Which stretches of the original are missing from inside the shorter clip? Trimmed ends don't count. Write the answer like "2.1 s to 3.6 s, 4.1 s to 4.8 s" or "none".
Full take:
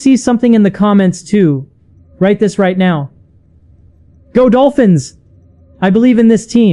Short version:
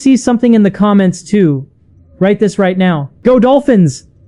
3.1 s to 4.2 s